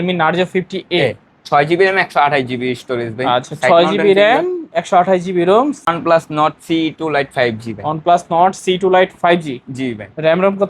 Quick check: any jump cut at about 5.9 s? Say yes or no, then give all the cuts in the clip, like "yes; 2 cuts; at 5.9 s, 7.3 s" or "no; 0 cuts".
yes; 1 cut; at 5.9 s